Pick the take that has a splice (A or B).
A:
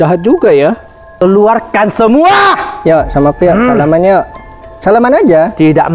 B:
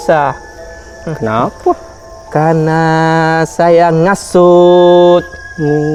A